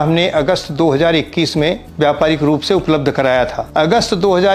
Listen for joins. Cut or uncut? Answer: cut